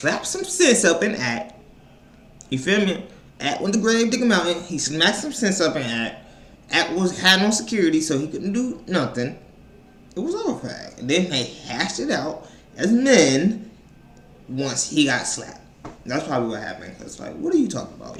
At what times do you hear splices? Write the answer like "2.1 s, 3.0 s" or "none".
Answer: none